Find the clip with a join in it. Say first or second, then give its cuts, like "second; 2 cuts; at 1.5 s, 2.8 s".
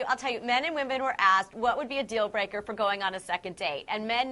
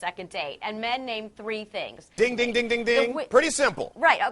second; 1 cut; at 2.1 s